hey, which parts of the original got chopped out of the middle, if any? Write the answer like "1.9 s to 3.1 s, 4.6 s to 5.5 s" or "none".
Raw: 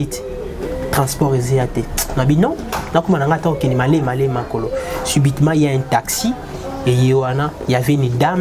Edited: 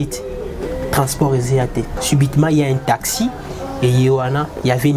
2.0 s to 5.0 s